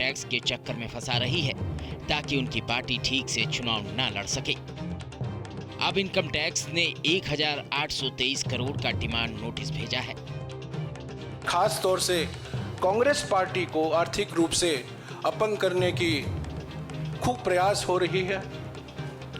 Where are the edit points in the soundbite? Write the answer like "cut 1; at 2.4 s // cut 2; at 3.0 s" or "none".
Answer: none